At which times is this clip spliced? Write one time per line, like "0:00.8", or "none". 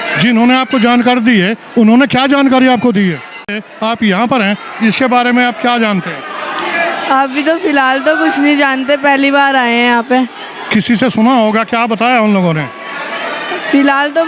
0:03.6